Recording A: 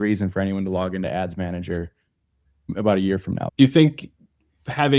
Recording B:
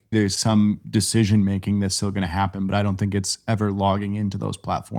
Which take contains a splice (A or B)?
A